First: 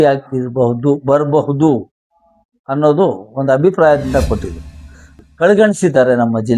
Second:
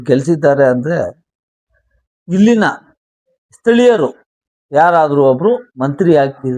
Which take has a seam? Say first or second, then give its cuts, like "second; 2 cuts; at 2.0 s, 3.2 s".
first; 1 cut; at 5.1 s